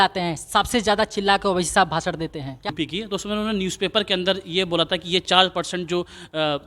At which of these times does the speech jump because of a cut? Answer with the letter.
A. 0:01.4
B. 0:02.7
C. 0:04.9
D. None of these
B